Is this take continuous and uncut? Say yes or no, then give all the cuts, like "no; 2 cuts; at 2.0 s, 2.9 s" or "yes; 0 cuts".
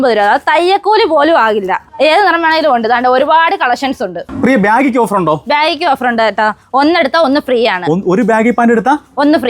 yes; 0 cuts